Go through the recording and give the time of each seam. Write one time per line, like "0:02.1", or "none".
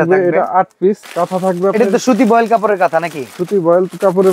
0:01.0